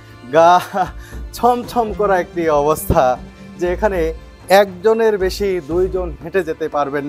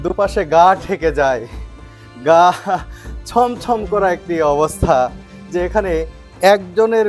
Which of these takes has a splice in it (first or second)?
first